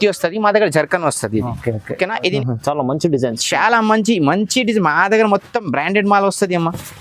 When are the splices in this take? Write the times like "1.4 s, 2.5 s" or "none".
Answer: 2.4 s